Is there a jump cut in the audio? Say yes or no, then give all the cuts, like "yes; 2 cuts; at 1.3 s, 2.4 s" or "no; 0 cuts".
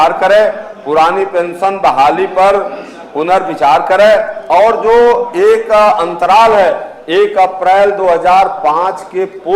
no; 0 cuts